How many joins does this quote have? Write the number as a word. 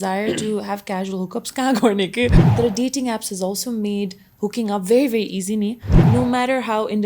two